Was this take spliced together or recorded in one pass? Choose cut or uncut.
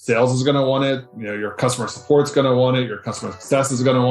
cut